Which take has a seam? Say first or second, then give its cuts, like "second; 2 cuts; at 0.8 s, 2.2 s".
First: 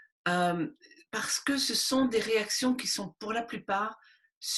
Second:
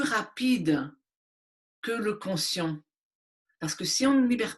second; 1 cut; at 3.4 s